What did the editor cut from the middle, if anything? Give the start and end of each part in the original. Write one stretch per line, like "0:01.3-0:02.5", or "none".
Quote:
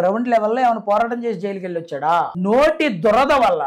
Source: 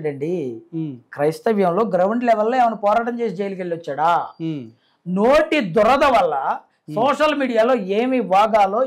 0:04.3-0:05.0